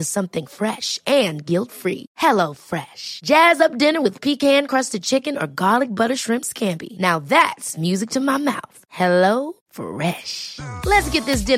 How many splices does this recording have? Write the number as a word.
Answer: zero